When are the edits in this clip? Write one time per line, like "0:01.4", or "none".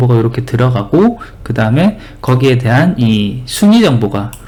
none